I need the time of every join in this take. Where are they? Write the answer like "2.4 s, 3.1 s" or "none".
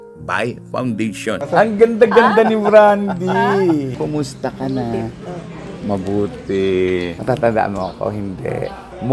1.4 s, 3.9 s, 7.1 s